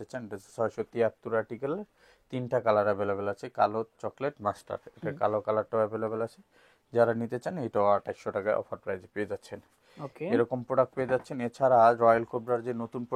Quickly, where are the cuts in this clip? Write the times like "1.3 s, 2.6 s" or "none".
none